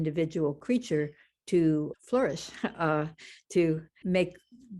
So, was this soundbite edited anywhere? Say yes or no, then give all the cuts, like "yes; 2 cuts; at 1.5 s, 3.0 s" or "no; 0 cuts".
yes; 2 cuts; at 1.9 s, 3.9 s